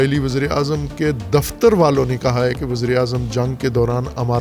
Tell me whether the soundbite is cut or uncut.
uncut